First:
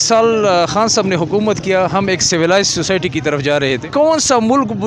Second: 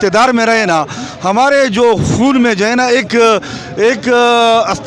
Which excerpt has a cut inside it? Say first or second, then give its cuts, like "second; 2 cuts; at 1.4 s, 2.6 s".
first; 1 cut; at 3.8 s